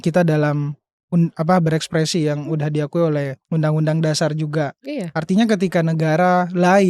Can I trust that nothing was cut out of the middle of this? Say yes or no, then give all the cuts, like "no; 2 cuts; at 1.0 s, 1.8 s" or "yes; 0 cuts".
no; 1 cut; at 3.4 s